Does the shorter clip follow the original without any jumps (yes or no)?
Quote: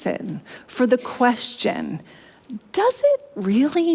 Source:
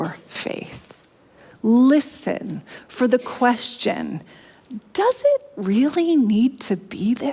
yes